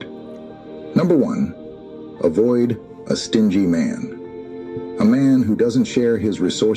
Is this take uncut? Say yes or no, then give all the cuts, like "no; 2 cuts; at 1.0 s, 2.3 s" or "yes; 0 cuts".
yes; 0 cuts